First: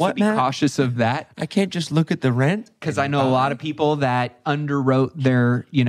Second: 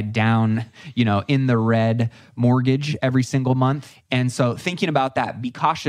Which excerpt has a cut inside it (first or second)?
second